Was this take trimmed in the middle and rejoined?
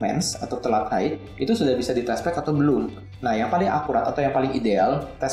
no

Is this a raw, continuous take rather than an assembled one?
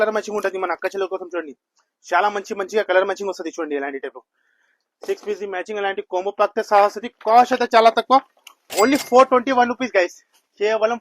yes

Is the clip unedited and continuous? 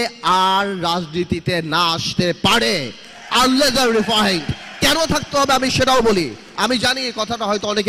yes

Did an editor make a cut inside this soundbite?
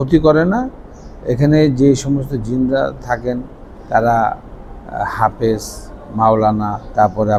no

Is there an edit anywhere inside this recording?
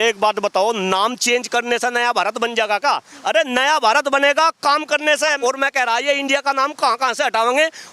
yes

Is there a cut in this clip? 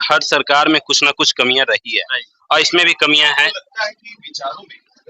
no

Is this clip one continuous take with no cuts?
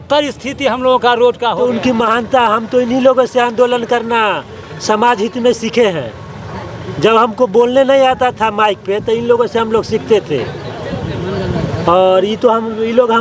no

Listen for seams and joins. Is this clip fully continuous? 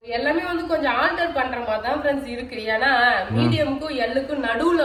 yes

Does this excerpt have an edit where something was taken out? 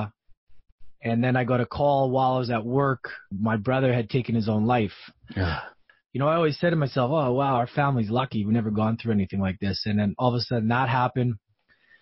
yes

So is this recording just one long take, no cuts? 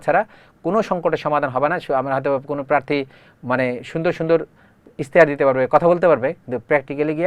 yes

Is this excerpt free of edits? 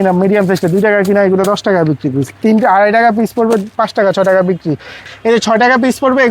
no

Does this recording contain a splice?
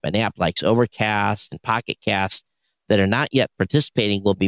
no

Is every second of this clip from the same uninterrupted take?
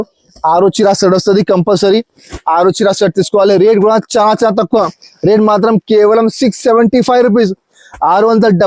yes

